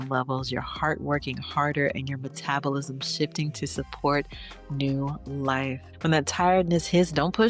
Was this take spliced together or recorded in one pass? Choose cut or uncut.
uncut